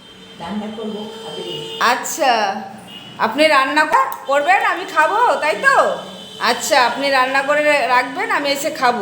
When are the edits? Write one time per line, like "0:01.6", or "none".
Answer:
0:03.9